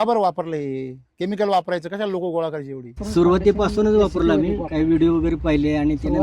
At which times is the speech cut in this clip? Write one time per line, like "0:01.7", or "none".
0:03.0